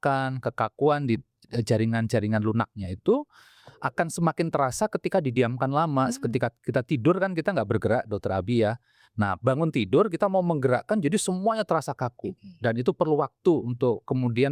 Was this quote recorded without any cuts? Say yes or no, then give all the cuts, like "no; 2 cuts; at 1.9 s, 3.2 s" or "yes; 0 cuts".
yes; 0 cuts